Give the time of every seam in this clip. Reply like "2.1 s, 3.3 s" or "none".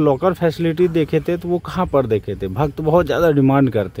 none